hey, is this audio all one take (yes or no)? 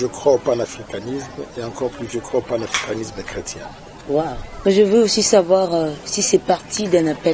no